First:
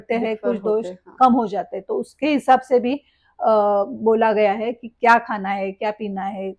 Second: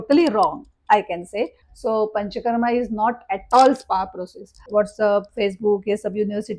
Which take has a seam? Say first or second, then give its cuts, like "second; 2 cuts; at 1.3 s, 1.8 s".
second; 2 cuts; at 1.6 s, 4.6 s